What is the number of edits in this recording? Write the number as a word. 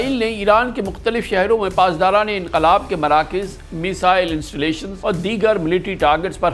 one